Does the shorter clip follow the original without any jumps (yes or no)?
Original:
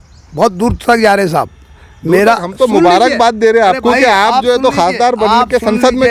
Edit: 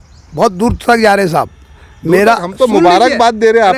yes